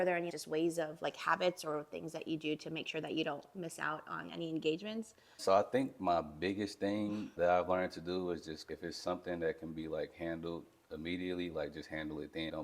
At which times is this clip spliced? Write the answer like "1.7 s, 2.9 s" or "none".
none